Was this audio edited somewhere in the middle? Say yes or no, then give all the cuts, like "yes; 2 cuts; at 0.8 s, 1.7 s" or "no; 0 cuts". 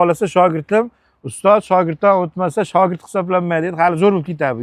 no; 0 cuts